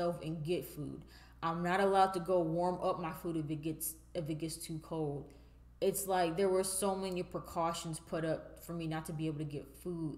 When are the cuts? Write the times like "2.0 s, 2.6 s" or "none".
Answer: none